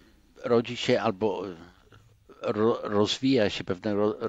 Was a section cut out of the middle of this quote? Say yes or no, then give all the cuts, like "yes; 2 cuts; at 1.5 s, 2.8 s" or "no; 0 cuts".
no; 0 cuts